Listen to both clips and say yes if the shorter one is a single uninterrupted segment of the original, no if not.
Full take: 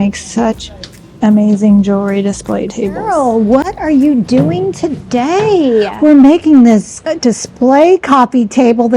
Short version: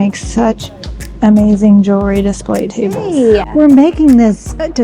no